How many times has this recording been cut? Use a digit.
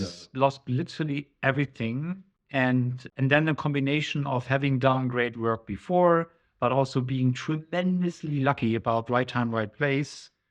2